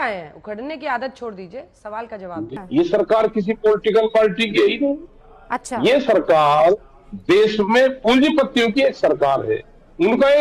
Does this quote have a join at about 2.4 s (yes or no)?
yes